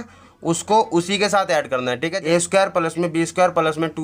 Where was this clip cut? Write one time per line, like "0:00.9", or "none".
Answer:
0:02.2